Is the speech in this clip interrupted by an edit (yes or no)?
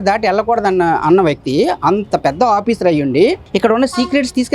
yes